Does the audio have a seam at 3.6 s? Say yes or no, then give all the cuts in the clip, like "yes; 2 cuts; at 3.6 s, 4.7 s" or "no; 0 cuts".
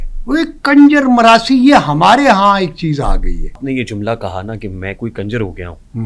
yes; 1 cut; at 3.6 s